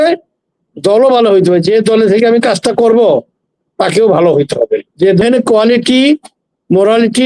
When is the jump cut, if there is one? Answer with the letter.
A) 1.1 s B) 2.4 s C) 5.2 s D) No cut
C